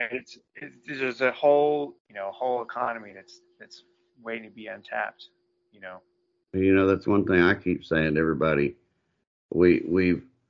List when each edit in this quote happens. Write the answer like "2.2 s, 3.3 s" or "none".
2.0 s